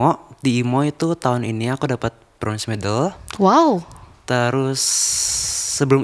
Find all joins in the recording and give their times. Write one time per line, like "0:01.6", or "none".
none